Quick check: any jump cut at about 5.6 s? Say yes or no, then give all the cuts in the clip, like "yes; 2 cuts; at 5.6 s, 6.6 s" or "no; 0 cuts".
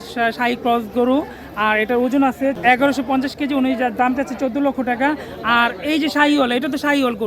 no; 1 cut; at 2.6 s